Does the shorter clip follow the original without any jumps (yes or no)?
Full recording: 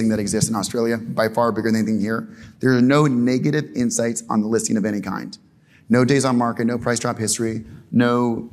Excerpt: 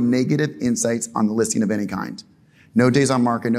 yes